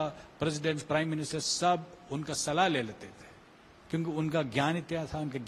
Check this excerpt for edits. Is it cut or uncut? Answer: uncut